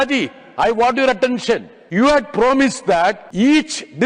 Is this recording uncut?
no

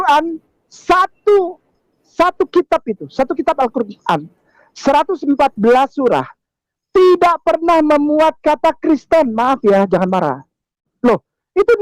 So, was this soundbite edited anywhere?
yes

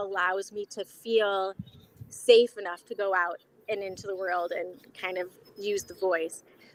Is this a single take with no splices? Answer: yes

